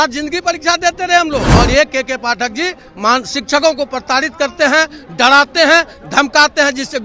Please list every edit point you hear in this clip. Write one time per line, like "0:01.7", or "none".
0:01.5